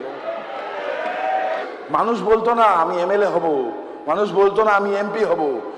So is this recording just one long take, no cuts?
no; 1 cut; at 1.5 s

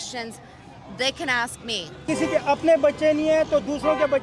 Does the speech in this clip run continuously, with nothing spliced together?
no; 1 cut; at 2.0 s

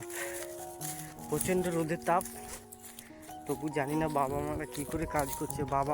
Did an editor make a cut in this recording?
no; 0 cuts

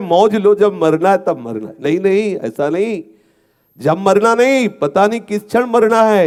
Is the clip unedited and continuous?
yes; 0 cuts

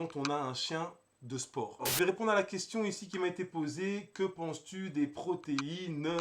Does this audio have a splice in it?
yes; 1 cut; at 1.9 s

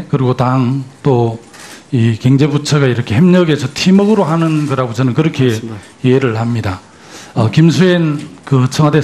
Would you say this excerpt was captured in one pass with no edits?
yes; 0 cuts

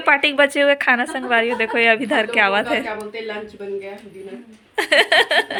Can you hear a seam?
no; 0 cuts

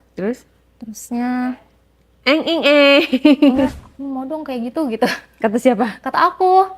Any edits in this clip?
yes; 1 cut; at 3.7 s

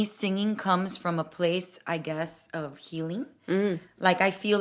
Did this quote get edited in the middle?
no; 0 cuts

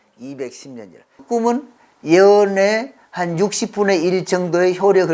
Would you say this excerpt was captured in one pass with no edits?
no; 1 cut; at 1.2 s

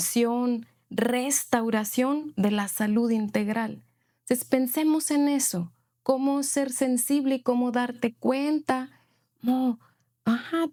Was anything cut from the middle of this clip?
no; 0 cuts

